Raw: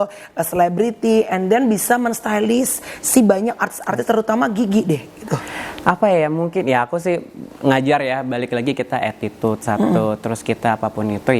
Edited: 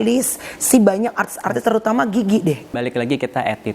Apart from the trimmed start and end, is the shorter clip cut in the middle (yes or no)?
yes